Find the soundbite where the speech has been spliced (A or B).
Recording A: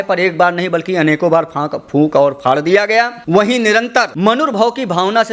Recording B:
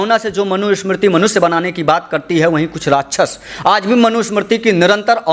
A